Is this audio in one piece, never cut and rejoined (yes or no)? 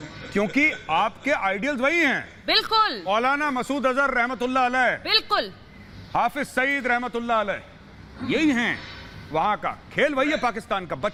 yes